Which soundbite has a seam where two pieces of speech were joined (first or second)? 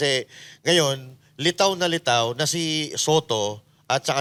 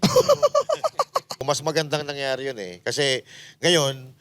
second